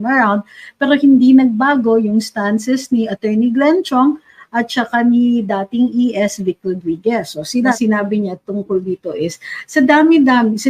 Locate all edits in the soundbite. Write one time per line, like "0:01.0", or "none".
0:07.8